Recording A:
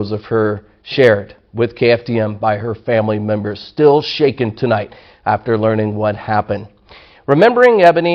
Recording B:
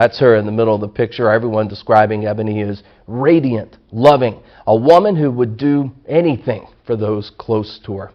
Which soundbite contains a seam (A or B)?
B